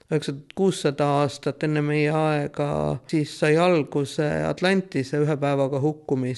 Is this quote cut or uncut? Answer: cut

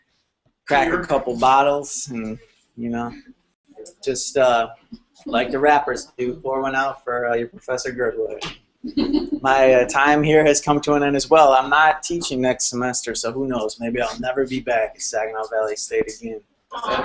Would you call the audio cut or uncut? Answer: cut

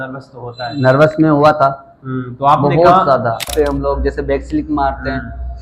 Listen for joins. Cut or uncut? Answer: cut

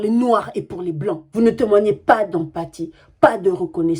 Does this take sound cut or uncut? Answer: cut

